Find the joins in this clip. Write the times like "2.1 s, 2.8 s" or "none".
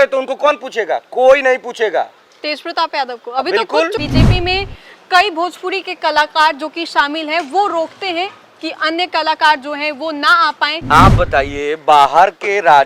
4.0 s, 10.8 s